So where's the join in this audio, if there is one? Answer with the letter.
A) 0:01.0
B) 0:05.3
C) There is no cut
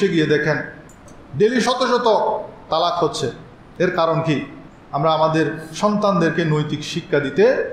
A